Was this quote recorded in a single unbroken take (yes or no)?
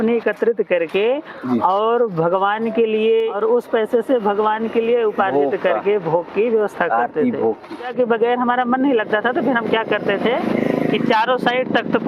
no